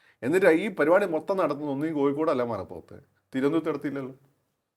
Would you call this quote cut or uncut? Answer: uncut